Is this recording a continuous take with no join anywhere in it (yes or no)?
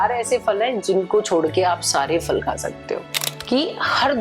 no